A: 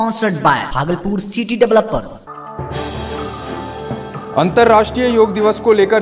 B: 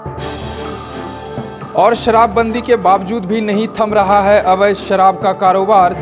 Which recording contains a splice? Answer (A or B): B